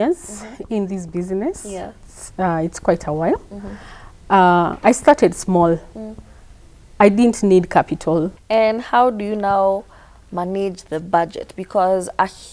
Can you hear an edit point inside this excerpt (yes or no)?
yes